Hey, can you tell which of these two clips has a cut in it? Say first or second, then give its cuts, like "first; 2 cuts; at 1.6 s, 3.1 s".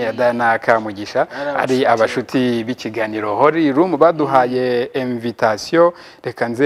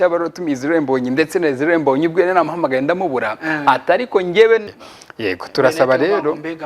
second; 1 cut; at 4.8 s